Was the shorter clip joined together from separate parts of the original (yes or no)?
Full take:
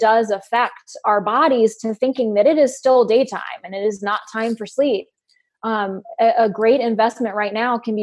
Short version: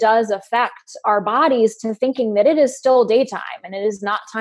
no